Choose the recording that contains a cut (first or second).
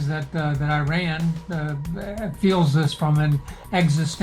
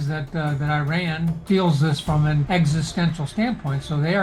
second